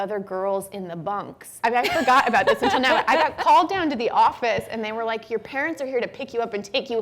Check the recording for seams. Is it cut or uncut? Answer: cut